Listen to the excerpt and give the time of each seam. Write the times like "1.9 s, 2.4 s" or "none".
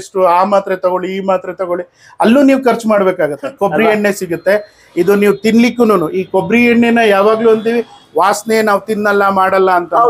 3.5 s